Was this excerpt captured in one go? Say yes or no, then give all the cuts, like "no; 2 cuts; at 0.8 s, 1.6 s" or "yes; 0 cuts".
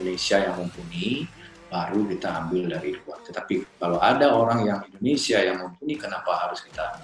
yes; 0 cuts